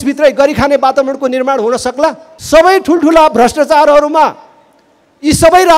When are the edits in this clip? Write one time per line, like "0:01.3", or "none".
0:02.3